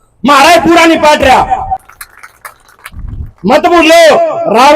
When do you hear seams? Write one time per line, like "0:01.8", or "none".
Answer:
0:01.7

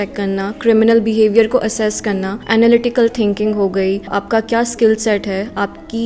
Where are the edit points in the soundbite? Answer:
0:02.4
0:04.2

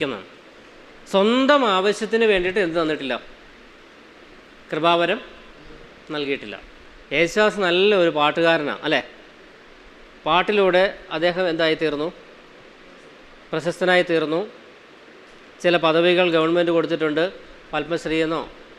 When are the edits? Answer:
none

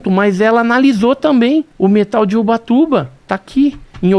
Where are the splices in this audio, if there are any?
0:01.7

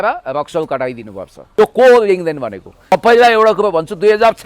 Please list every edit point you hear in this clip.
0:01.4
0:02.8

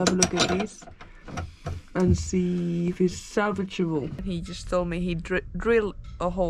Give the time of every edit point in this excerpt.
0:04.2

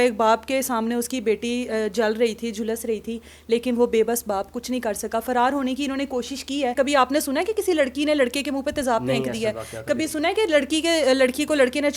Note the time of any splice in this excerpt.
0:06.7

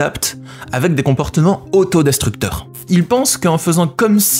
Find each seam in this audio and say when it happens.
0:02.7

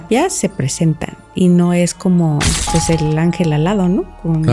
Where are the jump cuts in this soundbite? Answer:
0:02.6

